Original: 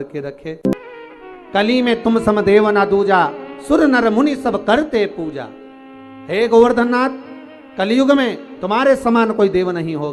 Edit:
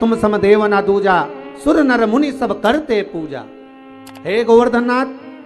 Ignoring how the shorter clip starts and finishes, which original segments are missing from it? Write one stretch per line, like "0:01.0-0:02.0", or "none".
none